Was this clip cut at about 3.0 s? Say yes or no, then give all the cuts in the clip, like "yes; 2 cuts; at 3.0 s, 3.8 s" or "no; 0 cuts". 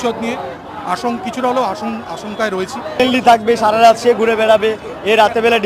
yes; 1 cut; at 3.0 s